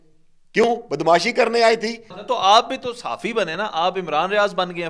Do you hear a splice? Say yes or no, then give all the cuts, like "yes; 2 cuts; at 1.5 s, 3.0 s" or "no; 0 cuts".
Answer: yes; 1 cut; at 2.1 s